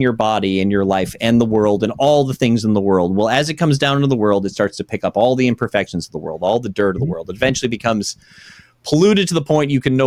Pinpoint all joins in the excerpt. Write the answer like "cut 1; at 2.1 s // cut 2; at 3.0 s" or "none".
none